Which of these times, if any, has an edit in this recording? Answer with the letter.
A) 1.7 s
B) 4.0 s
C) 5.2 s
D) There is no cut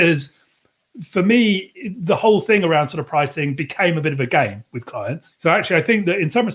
C